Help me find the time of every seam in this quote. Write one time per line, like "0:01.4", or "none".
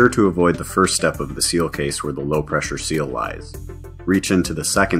none